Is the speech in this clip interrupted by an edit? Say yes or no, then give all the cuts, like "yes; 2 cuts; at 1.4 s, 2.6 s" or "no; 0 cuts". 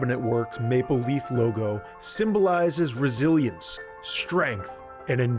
no; 0 cuts